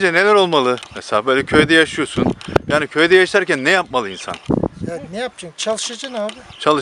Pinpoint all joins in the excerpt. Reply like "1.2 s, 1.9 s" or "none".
0.9 s